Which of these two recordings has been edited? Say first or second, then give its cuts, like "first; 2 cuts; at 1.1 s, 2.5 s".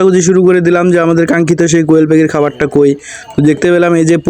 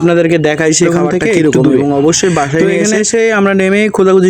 second; 1 cut; at 2.7 s